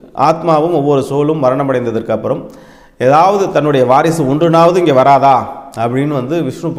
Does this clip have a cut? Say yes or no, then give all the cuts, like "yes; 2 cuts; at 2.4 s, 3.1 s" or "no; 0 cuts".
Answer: no; 0 cuts